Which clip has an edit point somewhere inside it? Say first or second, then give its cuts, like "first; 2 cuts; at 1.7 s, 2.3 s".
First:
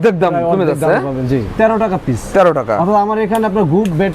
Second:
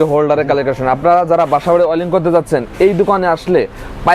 first; 1 cut; at 1.5 s